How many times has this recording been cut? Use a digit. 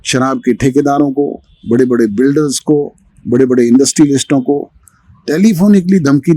0